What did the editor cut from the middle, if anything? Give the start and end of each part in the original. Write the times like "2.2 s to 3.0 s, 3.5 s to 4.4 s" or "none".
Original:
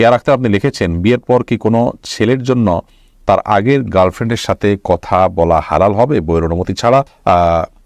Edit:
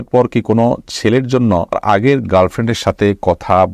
3.0 s to 3.4 s